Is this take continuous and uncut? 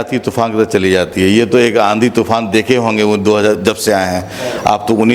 yes; 0 cuts

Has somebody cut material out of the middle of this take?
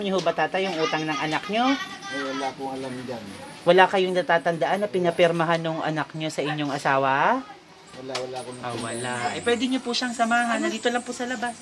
no; 0 cuts

